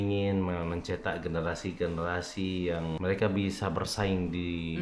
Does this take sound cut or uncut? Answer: cut